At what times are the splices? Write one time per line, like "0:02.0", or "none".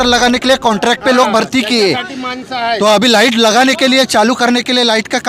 none